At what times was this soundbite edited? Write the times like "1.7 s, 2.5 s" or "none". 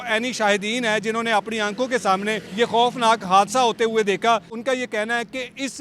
2.4 s, 4.6 s